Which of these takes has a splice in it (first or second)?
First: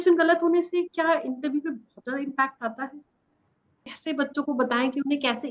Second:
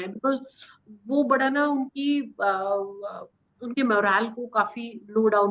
first